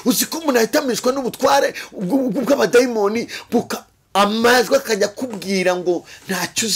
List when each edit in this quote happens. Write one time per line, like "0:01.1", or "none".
none